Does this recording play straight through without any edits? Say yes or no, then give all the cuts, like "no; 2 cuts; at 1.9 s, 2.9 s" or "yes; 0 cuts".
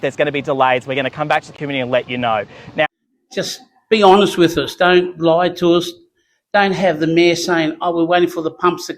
no; 1 cut; at 2.9 s